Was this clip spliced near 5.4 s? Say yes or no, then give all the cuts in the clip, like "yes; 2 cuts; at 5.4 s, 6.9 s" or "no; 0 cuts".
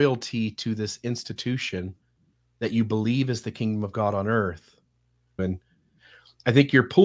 yes; 1 cut; at 5.4 s